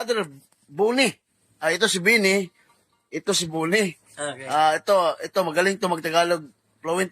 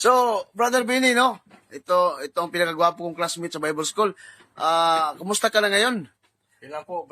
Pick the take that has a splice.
first; 1 cut; at 5.0 s

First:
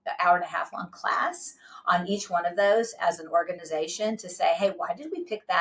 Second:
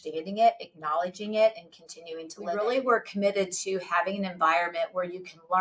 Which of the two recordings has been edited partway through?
second; 1 cut; at 2.5 s

